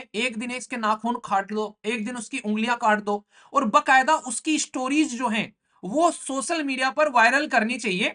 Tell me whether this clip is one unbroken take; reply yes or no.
yes